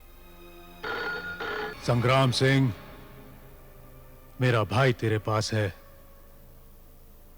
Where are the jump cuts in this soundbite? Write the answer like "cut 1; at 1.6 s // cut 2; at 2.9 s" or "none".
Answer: cut 1; at 1.7 s